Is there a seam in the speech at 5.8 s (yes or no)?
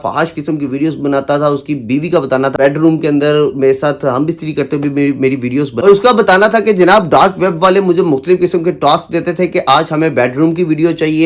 yes